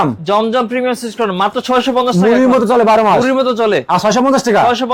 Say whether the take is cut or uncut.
uncut